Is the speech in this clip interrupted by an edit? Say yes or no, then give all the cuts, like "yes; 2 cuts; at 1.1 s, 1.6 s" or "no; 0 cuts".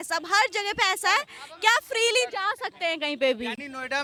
no; 0 cuts